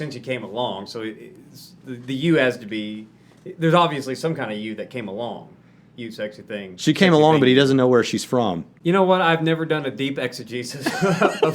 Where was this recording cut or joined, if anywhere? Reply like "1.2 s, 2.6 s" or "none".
8.7 s

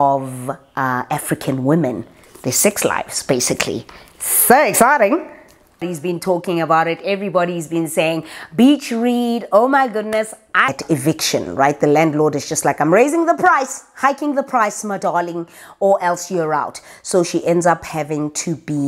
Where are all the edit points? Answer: 5.8 s, 10.7 s

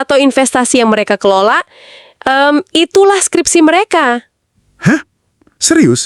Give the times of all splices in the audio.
none

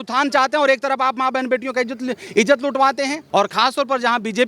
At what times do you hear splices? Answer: 3.2 s

